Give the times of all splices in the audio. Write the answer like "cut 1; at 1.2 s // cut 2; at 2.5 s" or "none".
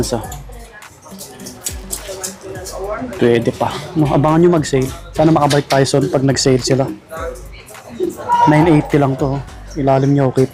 none